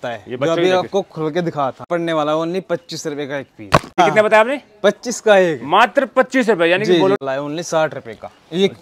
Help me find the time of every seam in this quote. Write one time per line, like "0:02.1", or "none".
0:01.9
0:04.0
0:07.2